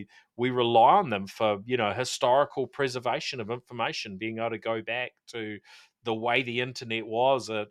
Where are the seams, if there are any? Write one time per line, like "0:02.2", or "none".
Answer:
none